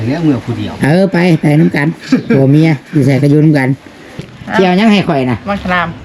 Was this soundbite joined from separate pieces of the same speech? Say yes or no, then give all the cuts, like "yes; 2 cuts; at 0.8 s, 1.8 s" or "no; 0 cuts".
yes; 1 cut; at 4.4 s